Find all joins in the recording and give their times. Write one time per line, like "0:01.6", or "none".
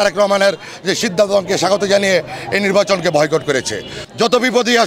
0:03.9